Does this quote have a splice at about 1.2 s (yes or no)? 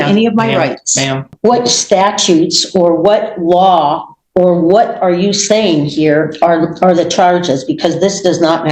yes